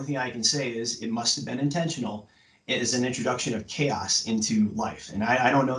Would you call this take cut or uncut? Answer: uncut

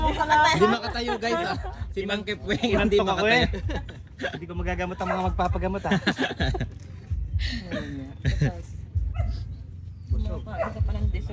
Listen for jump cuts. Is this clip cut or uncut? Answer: uncut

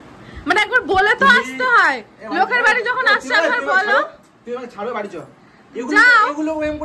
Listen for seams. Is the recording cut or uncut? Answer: uncut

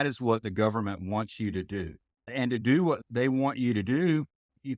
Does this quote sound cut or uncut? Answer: cut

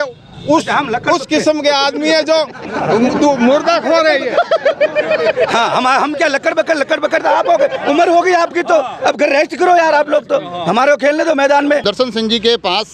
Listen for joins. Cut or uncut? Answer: cut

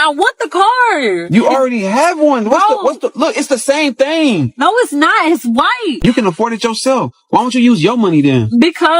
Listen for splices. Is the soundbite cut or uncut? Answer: cut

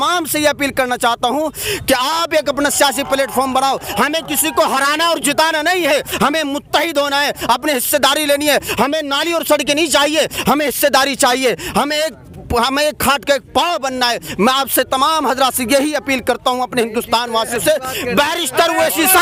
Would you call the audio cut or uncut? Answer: uncut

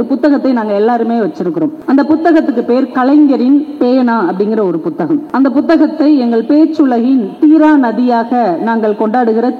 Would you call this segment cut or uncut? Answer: cut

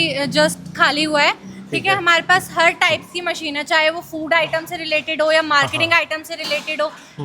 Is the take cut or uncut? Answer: uncut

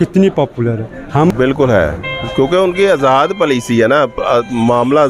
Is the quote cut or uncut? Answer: cut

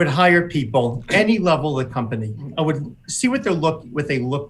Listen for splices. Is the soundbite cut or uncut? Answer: cut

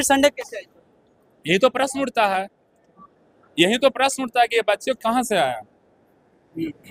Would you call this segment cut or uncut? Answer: uncut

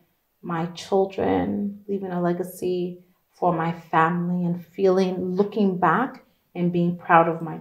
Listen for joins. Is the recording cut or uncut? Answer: uncut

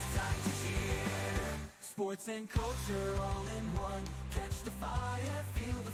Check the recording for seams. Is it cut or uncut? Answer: uncut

